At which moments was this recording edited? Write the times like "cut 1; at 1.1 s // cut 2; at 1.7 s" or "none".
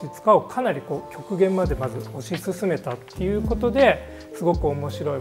none